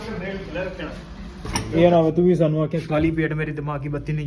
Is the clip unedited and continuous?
no; 1 cut; at 1.5 s

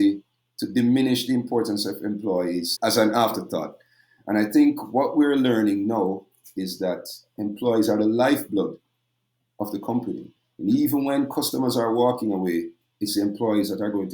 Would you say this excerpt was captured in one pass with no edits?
yes; 0 cuts

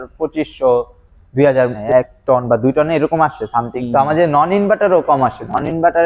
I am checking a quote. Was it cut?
yes; 2 cuts; at 1.8 s, 3.8 s

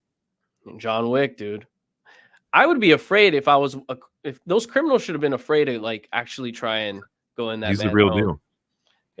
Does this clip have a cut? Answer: no; 0 cuts

